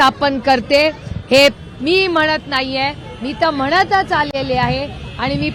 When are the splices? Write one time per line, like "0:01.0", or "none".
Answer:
none